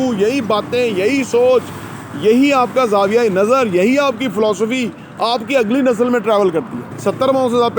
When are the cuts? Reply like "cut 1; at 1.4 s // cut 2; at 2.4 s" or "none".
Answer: cut 1; at 6.9 s